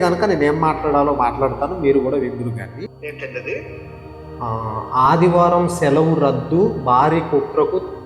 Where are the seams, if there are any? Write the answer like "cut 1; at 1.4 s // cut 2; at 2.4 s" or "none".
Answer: cut 1; at 2.8 s